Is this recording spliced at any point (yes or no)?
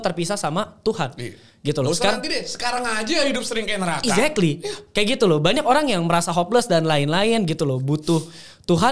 no